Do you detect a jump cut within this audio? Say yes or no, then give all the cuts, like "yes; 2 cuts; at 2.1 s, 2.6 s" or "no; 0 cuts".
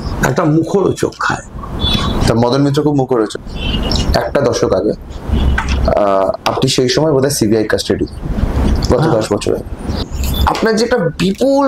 yes; 2 cuts; at 3.4 s, 10.1 s